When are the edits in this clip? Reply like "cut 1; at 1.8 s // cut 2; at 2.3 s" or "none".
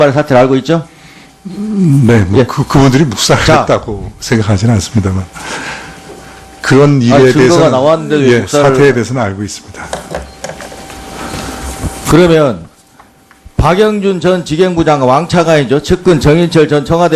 cut 1; at 2.8 s